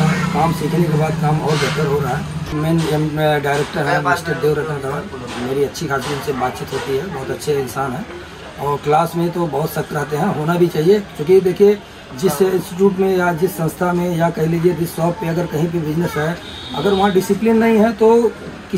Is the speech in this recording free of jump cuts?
no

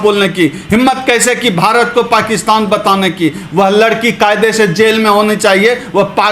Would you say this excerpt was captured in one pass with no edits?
yes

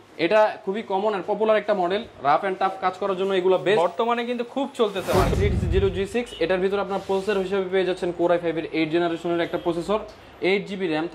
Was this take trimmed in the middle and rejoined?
yes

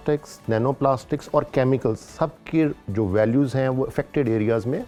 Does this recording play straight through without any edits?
yes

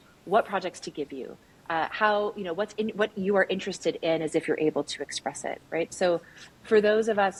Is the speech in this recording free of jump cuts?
yes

